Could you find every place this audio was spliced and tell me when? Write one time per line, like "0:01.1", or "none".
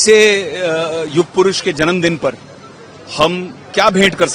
none